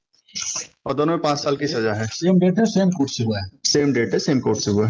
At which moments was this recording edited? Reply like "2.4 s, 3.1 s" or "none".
none